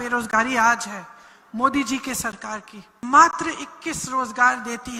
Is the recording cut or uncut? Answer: cut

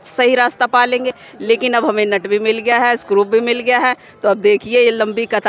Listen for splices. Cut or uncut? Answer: uncut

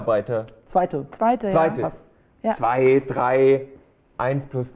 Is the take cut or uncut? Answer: cut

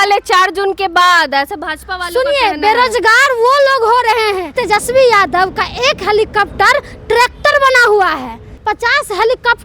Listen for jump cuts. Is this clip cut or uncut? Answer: cut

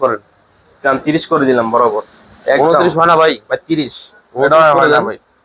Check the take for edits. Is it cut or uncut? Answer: uncut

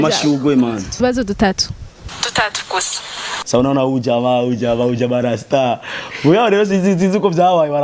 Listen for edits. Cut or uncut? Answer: cut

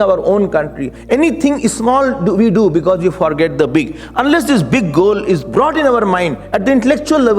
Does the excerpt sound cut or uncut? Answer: uncut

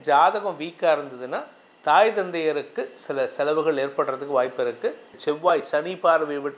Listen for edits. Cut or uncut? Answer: cut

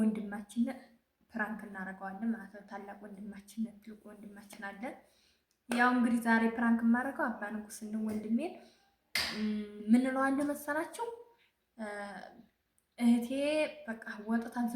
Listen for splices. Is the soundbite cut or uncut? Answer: uncut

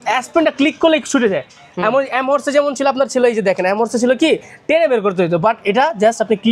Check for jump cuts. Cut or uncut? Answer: uncut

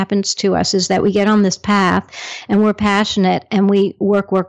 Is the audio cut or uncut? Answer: uncut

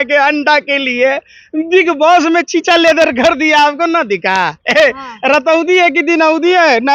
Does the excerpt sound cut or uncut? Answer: uncut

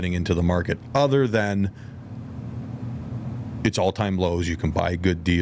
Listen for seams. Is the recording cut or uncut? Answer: uncut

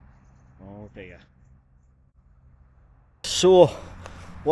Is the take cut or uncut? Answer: cut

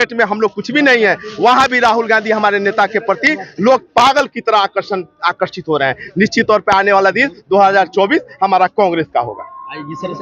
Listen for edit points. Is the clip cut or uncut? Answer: uncut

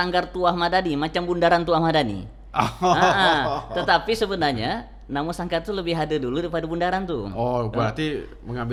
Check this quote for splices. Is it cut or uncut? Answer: uncut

